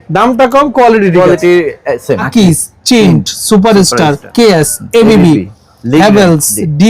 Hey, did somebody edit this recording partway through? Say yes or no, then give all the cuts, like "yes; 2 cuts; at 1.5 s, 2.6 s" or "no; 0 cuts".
yes; 2 cuts; at 2.3 s, 4.2 s